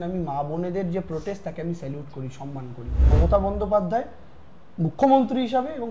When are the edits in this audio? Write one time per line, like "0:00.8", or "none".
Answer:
0:03.0